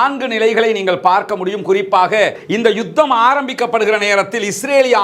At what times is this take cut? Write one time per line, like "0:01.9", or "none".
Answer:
0:02.4